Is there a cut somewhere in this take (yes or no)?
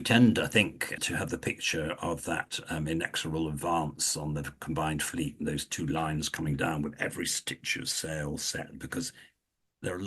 yes